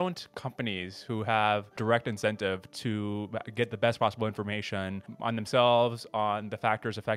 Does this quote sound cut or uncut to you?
cut